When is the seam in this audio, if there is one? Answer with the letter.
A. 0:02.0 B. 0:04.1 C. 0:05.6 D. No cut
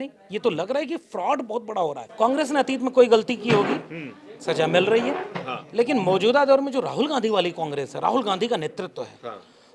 A